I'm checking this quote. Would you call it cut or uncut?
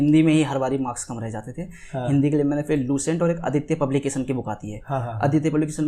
uncut